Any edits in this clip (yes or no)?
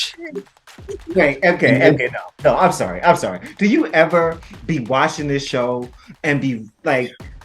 yes